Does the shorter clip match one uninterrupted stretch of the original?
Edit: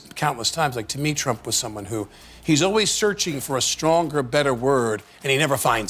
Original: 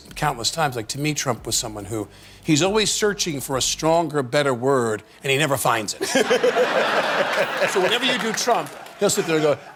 yes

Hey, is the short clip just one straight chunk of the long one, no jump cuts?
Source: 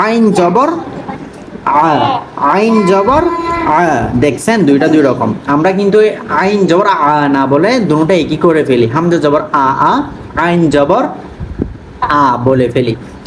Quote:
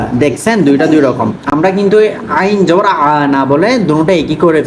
yes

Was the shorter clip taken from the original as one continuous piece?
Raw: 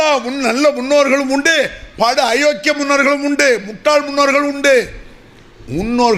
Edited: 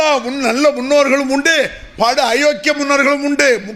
yes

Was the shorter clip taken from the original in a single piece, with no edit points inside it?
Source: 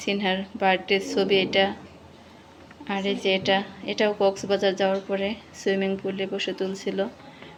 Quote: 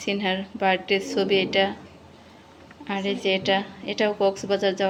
yes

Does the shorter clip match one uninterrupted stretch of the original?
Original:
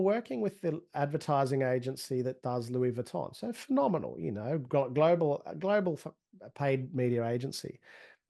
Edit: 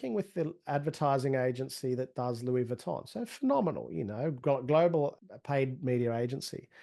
no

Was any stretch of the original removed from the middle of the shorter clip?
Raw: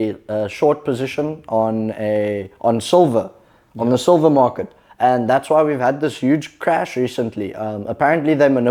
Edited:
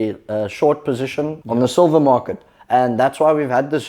yes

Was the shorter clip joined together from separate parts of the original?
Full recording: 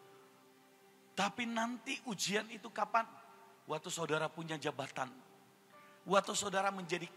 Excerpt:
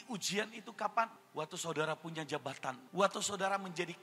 yes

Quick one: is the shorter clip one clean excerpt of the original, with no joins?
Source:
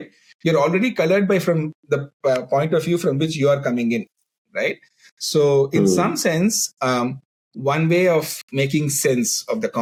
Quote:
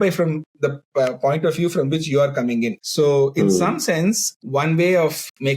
no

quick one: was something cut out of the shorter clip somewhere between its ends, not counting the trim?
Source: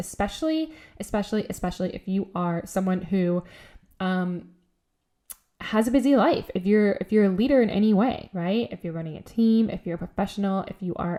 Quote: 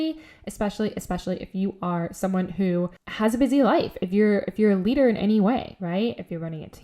yes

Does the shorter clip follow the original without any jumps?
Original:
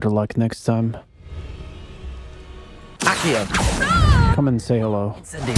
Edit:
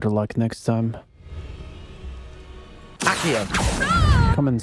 yes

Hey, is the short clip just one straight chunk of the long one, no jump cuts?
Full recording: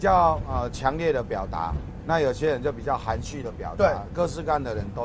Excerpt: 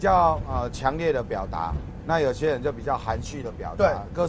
yes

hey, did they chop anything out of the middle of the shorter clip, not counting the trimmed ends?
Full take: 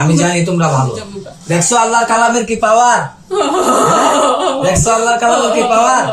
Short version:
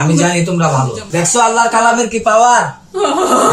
yes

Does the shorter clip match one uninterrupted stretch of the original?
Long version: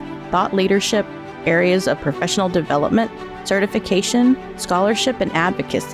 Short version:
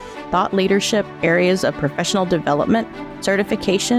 no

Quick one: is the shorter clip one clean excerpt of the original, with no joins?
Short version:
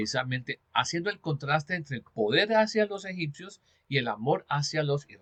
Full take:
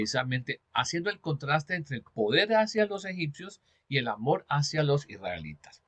yes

